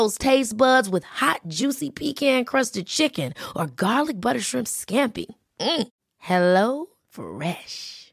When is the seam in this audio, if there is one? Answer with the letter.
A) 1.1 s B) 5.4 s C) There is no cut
C